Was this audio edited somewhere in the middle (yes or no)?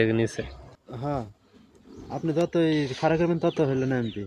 yes